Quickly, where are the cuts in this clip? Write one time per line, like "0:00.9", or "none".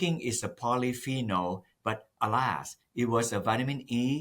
0:02.1

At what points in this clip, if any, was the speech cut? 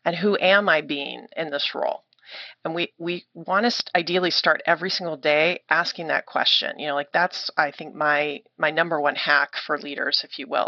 none

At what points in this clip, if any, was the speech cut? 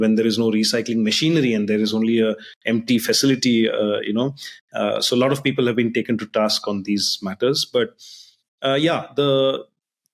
none

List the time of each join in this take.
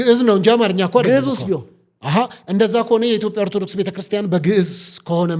none

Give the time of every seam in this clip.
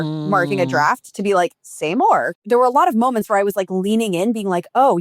0:02.4

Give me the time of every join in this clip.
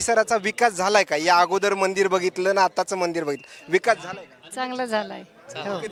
none

